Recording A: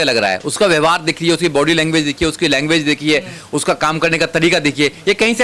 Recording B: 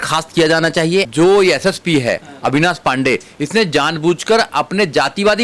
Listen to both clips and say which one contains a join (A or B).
B